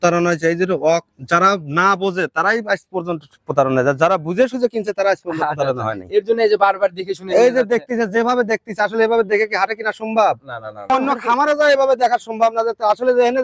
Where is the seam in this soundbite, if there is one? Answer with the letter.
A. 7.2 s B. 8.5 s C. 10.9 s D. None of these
C